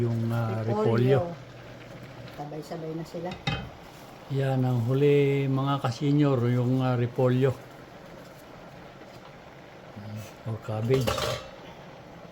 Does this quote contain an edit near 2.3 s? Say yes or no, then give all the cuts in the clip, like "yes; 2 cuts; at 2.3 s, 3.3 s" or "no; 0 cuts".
yes; 1 cut; at 2.3 s